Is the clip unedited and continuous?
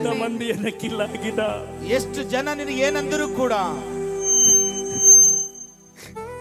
yes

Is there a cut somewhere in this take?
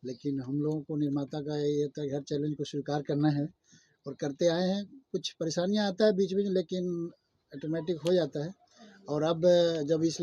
no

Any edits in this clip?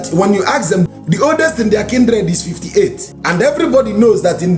yes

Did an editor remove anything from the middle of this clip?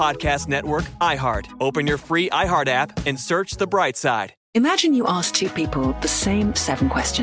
yes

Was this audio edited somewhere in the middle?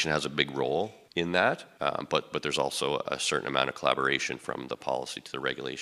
yes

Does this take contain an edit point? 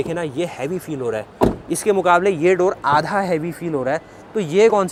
no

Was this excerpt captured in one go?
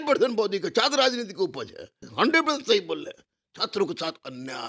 no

